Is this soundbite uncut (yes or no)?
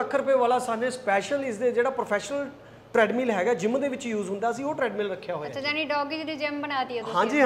yes